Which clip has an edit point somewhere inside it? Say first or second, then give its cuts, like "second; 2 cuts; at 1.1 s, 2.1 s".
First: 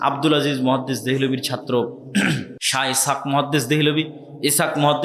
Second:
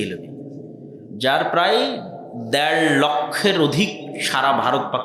first; 1 cut; at 2.6 s